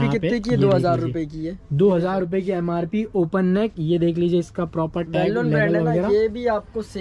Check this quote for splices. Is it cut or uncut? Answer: uncut